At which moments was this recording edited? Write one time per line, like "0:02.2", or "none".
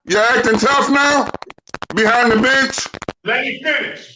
0:03.1